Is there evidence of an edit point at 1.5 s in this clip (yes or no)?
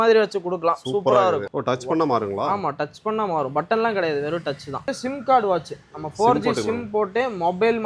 yes